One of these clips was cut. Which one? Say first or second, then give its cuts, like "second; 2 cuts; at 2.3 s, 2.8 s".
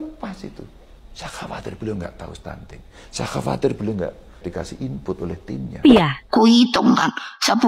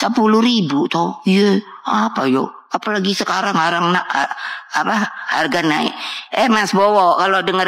first; 1 cut; at 5.8 s